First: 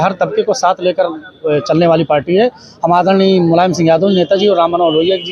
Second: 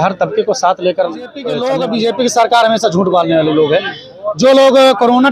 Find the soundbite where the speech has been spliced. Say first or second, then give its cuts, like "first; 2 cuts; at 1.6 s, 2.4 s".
second; 1 cut; at 1.5 s